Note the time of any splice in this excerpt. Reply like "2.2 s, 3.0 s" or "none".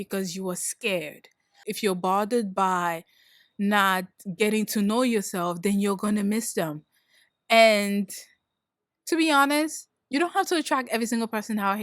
1.7 s